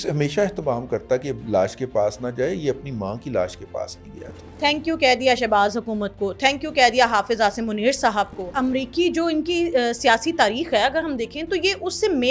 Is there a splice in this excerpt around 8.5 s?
yes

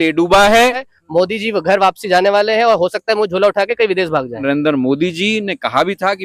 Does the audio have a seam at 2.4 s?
no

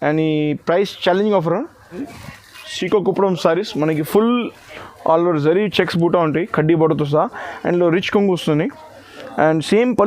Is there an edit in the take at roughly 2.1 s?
yes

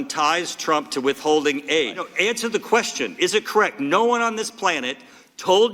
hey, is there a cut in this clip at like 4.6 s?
no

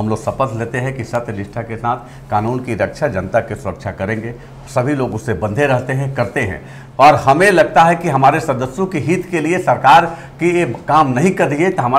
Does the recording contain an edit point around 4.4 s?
no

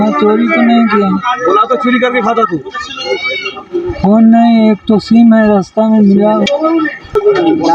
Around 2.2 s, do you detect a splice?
no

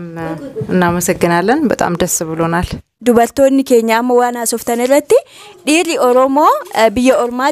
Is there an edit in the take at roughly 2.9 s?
yes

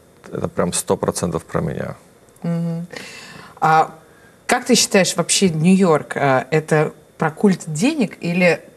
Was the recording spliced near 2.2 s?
no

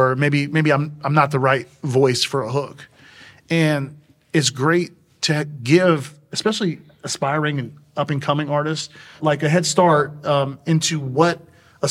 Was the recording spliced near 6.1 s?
no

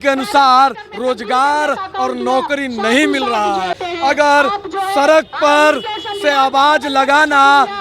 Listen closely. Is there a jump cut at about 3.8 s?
yes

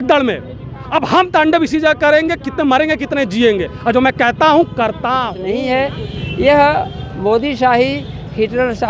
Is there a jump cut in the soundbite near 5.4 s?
yes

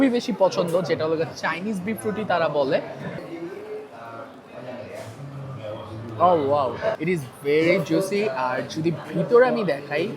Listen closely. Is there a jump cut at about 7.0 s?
yes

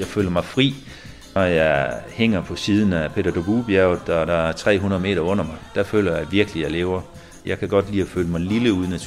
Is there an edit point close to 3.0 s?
no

